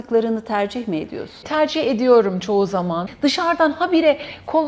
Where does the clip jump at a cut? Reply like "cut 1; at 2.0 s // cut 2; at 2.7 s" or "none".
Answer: cut 1; at 1.4 s // cut 2; at 3.0 s